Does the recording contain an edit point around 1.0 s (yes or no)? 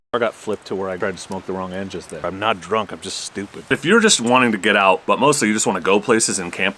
yes